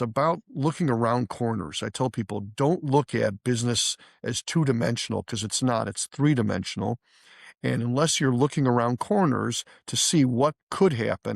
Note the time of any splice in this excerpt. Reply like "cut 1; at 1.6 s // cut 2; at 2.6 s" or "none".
none